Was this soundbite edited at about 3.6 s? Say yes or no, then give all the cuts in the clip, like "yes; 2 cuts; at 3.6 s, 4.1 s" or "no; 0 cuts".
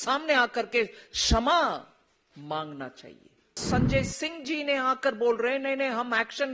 yes; 1 cut; at 3.6 s